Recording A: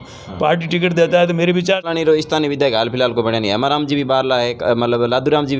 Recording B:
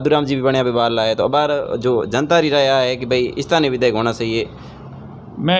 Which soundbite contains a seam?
A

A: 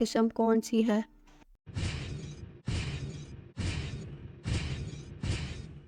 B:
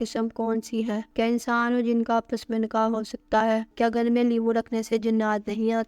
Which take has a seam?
B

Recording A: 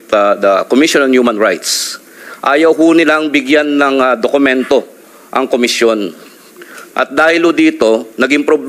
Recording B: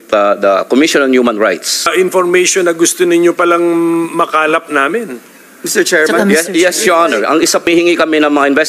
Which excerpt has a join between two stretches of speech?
B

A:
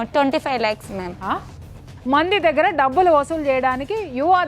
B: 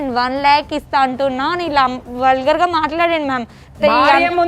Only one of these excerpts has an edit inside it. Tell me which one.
A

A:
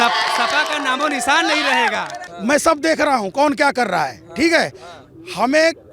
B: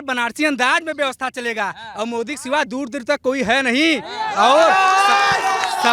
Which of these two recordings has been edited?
A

